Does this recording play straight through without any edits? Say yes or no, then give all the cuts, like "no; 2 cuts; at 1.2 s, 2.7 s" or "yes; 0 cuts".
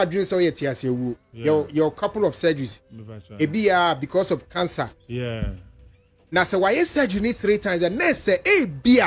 no; 1 cut; at 1.3 s